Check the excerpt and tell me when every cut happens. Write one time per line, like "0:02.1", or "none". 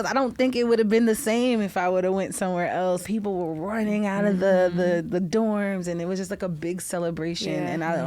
0:03.0